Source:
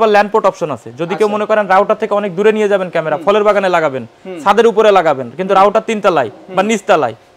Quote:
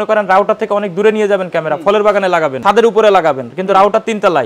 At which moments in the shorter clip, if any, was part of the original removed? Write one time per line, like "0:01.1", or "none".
0:02.6